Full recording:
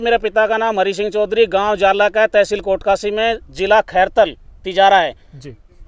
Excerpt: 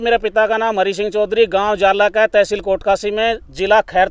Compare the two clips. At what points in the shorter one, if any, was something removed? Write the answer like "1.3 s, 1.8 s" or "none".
none